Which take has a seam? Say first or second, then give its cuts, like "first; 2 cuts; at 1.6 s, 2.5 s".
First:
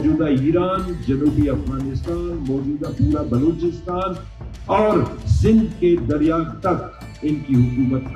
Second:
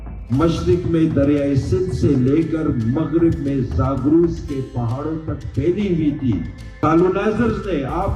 second; 1 cut; at 6.6 s